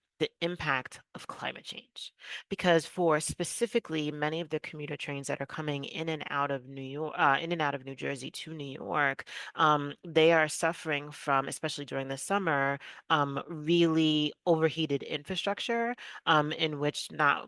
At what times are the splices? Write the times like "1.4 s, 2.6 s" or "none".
none